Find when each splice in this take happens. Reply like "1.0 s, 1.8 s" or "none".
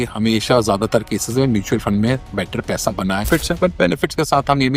3.3 s